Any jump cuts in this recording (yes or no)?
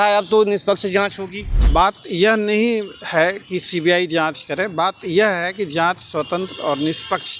yes